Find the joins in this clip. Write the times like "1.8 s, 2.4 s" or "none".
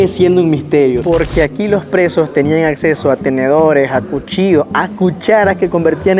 1.0 s